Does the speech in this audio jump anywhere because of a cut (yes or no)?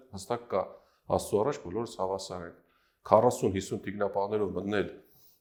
no